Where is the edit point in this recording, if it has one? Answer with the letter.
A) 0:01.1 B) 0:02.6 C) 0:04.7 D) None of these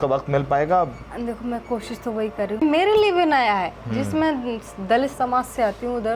B